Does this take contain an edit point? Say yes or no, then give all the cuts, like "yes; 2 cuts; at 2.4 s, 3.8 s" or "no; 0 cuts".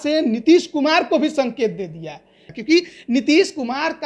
yes; 1 cut; at 2.4 s